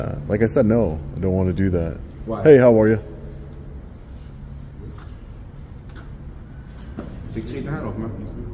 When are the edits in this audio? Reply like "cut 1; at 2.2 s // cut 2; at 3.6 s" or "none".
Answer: none

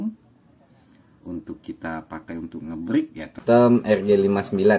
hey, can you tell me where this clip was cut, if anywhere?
cut 1; at 3.4 s

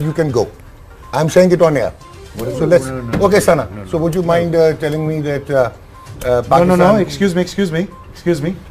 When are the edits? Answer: none

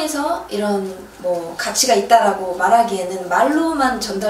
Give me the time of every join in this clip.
none

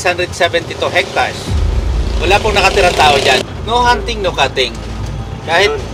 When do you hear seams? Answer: none

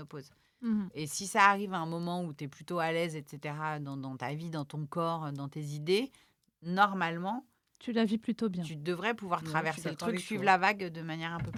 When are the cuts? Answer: none

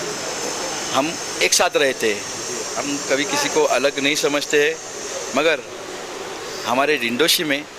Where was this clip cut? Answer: none

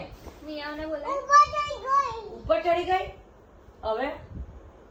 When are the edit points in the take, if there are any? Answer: none

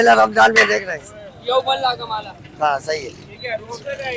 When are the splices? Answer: none

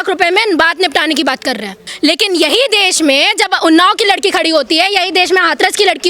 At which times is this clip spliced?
cut 1; at 1.8 s

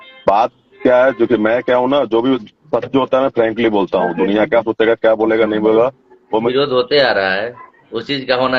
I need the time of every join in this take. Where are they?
cut 1; at 6.5 s

